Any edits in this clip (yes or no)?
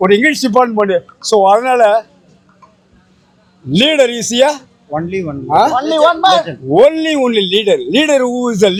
no